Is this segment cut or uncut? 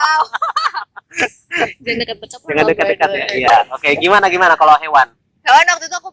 uncut